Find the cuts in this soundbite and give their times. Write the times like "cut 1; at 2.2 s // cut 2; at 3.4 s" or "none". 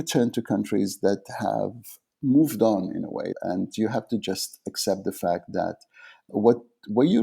cut 1; at 3.3 s // cut 2; at 6.3 s